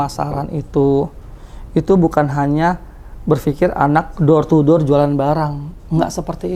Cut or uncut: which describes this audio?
uncut